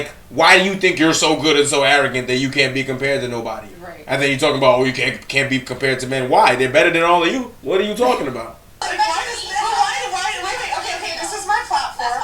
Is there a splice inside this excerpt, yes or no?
yes